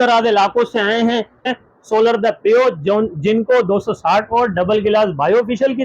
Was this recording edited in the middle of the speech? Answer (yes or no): yes